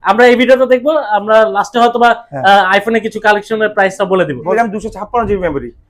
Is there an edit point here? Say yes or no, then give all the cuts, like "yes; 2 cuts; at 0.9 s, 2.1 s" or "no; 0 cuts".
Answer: yes; 1 cut; at 4.5 s